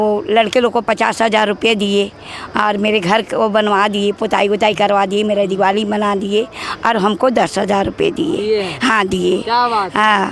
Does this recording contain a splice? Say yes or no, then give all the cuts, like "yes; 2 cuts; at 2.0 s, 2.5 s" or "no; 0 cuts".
no; 0 cuts